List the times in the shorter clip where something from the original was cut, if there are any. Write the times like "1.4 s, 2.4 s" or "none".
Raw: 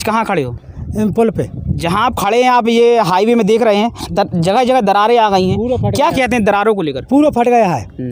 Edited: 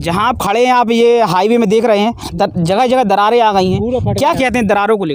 none